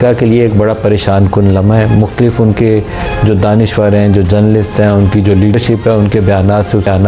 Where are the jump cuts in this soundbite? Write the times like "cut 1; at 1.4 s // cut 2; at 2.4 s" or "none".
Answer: none